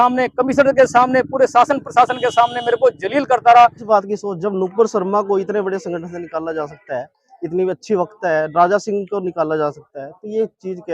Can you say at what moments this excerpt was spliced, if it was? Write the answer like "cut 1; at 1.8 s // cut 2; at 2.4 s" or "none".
cut 1; at 3.8 s